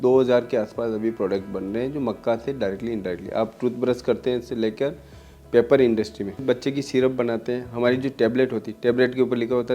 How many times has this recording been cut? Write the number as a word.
one